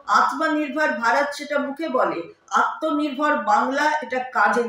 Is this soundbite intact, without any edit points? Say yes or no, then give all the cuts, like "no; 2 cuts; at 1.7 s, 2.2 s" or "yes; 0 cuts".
yes; 0 cuts